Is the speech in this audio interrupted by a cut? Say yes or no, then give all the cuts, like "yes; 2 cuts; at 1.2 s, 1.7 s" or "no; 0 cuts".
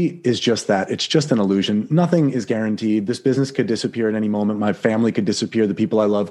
no; 0 cuts